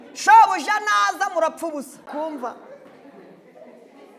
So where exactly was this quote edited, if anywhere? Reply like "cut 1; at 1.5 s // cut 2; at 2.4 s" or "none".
cut 1; at 2.1 s